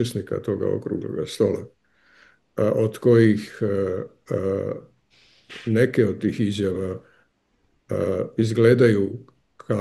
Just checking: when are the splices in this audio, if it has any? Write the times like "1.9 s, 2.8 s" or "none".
none